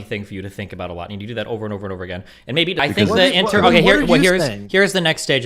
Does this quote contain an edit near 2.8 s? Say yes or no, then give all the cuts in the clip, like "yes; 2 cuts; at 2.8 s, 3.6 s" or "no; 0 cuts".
yes; 1 cut; at 2.8 s